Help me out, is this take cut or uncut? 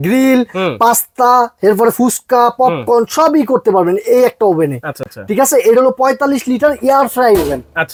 uncut